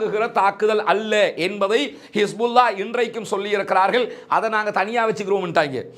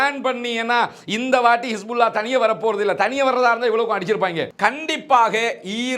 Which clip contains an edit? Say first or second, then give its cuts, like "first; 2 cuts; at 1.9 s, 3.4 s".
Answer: second; 1 cut; at 4.5 s